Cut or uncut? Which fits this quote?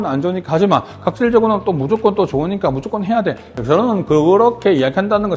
cut